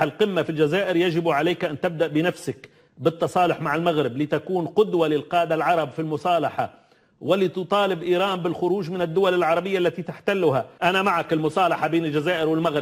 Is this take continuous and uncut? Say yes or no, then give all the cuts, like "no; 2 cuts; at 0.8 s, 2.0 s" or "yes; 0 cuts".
no; 1 cut; at 10.7 s